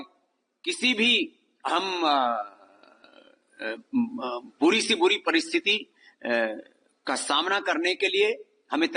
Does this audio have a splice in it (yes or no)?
no